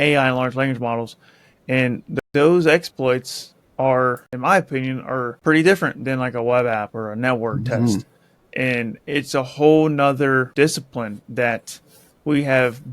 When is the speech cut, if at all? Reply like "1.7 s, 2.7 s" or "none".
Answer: 2.2 s, 4.3 s, 5.3 s, 10.5 s